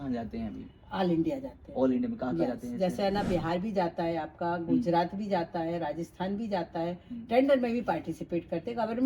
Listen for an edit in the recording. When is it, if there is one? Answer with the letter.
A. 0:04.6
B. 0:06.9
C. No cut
C